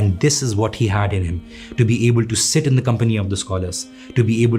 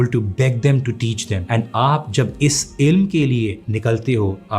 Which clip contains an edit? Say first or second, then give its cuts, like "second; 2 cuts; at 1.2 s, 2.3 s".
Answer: second; 2 cuts; at 1.3 s, 3.7 s